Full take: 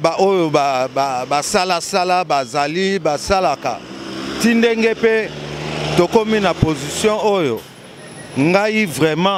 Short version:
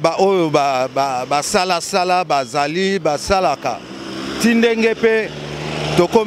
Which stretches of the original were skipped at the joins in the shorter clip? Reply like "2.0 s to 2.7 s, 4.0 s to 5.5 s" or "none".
none